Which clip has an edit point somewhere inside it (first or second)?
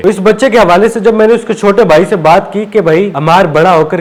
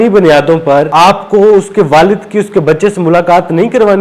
second